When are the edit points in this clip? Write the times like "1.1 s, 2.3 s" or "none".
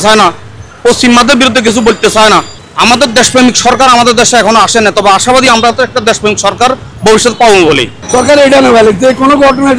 2.5 s, 7.9 s